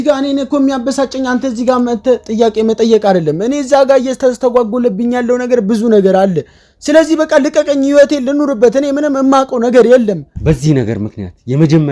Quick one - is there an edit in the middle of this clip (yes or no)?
yes